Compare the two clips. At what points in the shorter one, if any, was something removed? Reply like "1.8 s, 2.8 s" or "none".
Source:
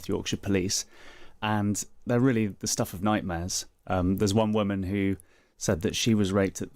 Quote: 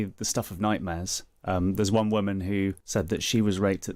2.8 s